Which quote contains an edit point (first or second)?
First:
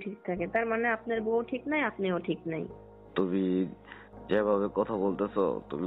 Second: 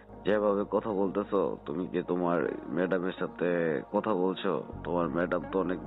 first